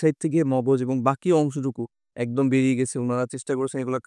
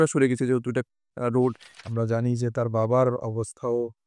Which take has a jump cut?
second; 1 cut; at 1.7 s

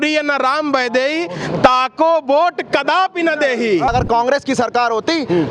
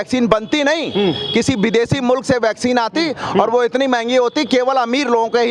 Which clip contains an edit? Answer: first; 1 cut; at 3.9 s

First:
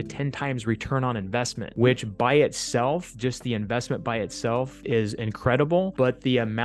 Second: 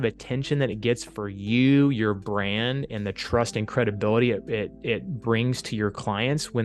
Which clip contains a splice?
first; 3 cuts; at 1.6 s, 4.8 s, 5.9 s

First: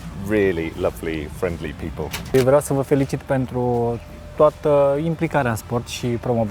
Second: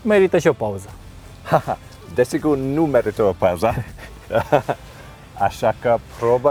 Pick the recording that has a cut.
first; 1 cut; at 2.3 s

